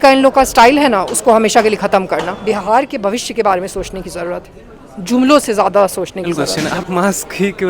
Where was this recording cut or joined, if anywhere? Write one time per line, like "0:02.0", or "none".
0:02.3
0:06.4